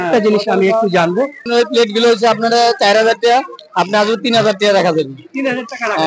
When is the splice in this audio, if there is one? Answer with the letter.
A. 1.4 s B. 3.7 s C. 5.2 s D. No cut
A